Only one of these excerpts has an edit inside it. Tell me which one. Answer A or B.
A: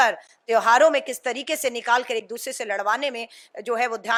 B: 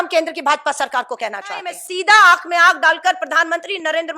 B